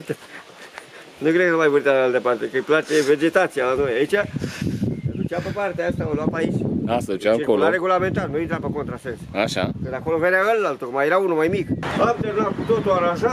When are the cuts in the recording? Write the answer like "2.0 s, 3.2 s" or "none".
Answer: 11.8 s

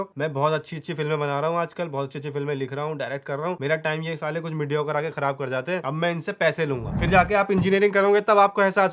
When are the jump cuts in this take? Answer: 6.9 s

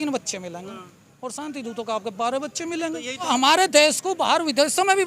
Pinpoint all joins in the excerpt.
3.3 s

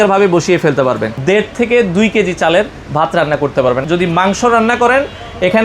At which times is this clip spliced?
1.1 s, 3.8 s

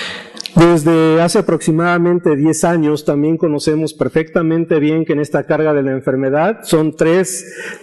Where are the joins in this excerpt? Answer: none

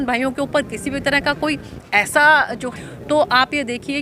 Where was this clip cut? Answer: 2.7 s

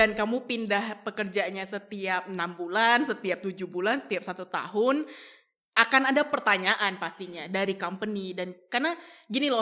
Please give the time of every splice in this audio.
none

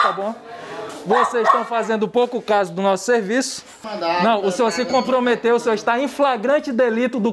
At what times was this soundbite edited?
3.8 s

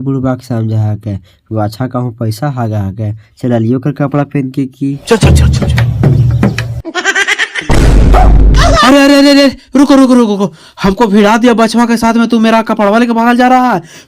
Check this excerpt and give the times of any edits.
7.5 s

